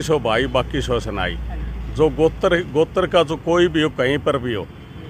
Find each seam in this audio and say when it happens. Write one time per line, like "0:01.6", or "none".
none